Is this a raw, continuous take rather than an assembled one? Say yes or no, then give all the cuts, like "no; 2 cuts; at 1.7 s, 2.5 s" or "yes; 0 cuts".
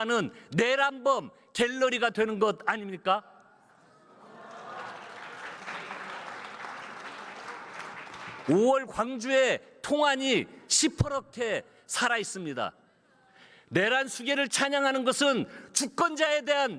yes; 0 cuts